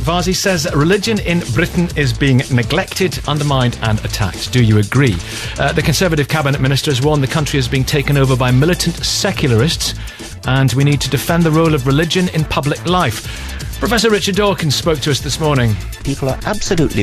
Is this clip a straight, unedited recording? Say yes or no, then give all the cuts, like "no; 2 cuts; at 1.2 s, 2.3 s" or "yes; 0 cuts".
no; 1 cut; at 13.5 s